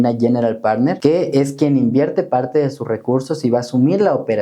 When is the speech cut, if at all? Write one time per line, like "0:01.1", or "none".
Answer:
0:01.0